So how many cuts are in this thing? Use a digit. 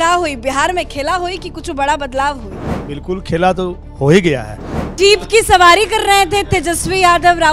1